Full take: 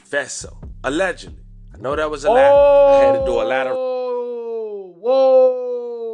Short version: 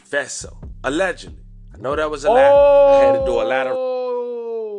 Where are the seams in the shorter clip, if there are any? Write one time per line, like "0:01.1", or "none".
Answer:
none